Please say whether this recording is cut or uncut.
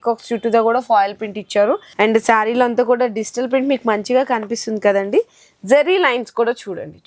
cut